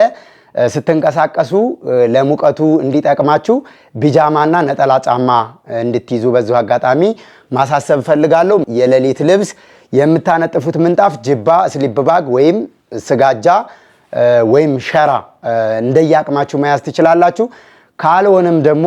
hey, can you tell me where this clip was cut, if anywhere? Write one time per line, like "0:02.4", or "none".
none

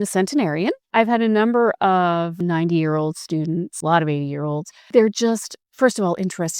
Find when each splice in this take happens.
0:00.8
0:02.4
0:03.7
0:04.9

